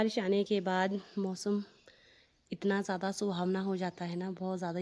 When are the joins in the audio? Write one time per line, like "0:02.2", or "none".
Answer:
none